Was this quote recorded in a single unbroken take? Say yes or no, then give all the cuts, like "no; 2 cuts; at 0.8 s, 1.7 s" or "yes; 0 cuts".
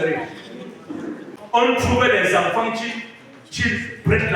no; 1 cut; at 1.3 s